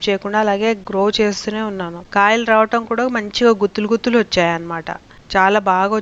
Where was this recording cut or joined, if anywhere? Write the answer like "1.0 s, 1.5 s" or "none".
0.8 s, 2.0 s